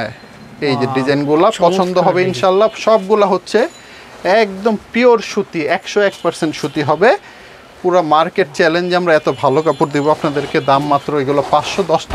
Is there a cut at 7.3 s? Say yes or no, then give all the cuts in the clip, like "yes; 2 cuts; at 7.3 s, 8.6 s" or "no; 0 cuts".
no; 0 cuts